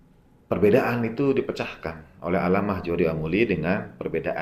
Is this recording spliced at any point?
no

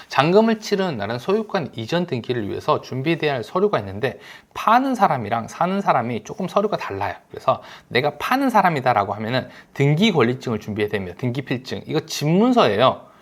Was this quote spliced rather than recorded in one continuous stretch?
no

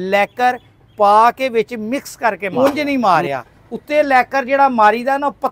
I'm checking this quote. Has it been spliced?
yes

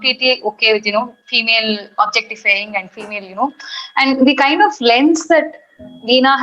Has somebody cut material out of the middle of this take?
no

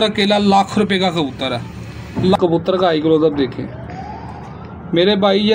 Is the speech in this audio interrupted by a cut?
yes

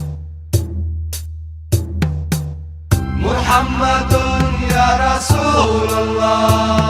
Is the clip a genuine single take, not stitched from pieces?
yes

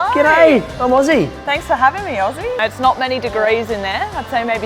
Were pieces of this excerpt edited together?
yes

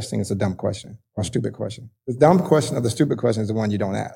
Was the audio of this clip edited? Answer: no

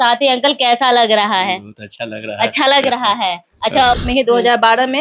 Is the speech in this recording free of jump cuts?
no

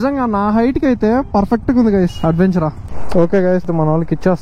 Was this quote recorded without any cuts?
yes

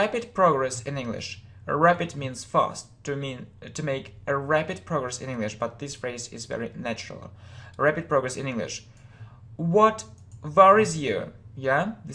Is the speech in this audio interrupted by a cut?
yes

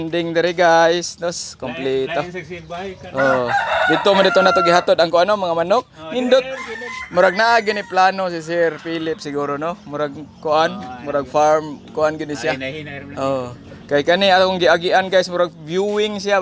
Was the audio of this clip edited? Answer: no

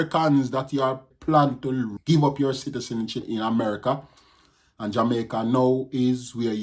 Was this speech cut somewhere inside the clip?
yes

